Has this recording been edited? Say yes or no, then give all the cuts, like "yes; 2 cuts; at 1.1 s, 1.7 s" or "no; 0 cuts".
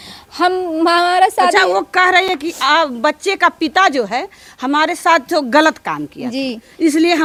no; 0 cuts